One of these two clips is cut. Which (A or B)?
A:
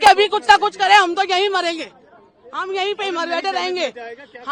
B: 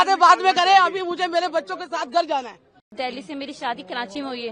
B